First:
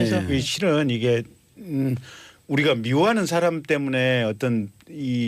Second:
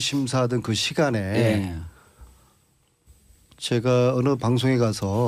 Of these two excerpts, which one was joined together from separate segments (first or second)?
second